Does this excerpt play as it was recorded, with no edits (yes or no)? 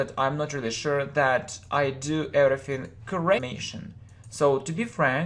yes